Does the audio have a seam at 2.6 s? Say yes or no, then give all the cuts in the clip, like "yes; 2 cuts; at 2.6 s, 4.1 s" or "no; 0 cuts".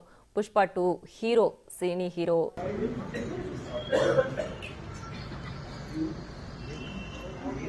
yes; 1 cut; at 2.6 s